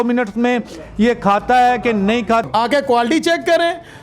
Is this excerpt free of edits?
no; 1 cut; at 2.4 s

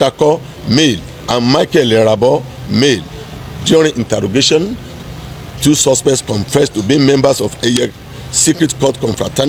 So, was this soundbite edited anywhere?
no; 0 cuts

